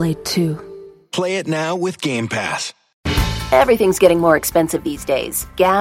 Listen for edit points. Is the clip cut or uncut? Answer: cut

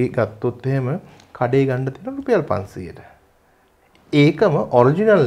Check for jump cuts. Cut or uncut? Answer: uncut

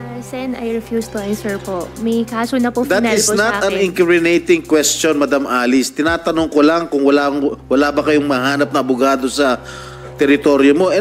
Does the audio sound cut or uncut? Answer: uncut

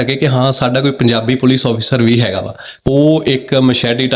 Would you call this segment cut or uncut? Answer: cut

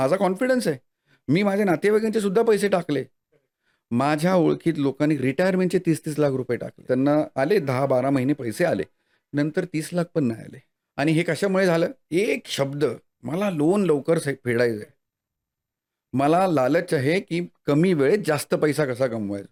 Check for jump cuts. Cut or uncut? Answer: uncut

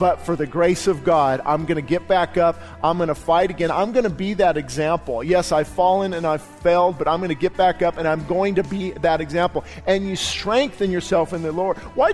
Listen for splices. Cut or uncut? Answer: uncut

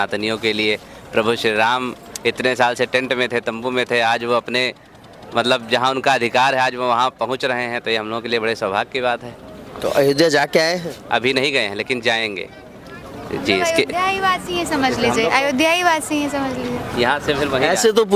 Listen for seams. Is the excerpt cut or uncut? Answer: uncut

